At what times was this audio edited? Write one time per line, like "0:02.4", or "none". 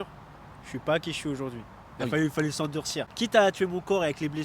0:03.1